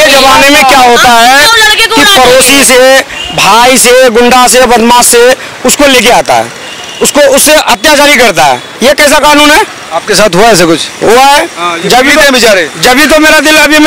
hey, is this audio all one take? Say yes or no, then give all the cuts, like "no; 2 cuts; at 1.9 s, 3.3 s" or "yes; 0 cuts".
yes; 0 cuts